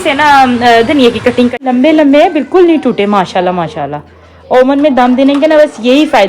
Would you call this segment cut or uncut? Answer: cut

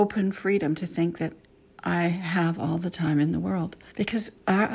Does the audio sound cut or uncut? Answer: cut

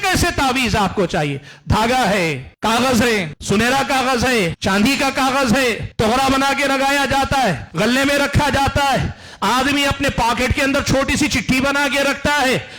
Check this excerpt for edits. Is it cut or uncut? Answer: cut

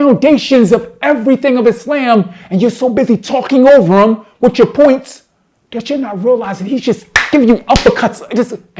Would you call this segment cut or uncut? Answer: uncut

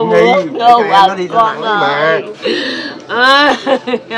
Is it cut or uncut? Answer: uncut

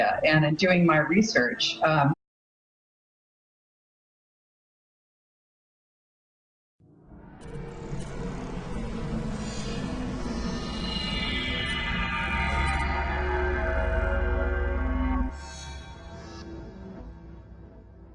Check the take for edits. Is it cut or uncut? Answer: uncut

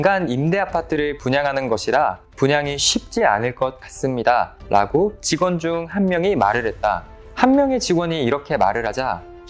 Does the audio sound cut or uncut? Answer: uncut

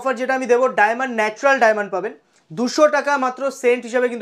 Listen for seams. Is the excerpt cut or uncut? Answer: uncut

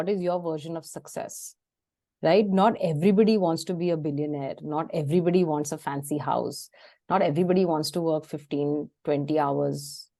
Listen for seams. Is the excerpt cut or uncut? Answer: uncut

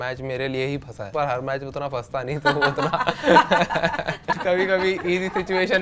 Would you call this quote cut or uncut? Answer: cut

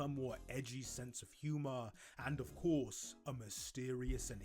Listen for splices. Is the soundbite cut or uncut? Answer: cut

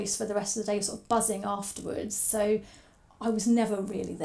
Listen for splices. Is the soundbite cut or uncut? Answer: uncut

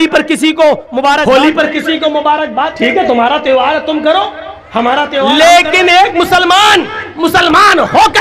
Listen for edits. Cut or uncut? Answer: cut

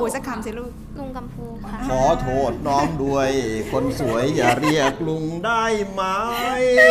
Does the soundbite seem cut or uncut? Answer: uncut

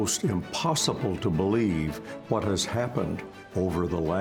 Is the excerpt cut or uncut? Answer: uncut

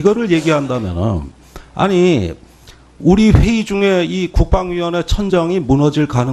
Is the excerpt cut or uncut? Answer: cut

